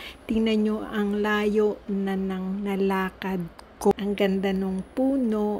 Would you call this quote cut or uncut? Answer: cut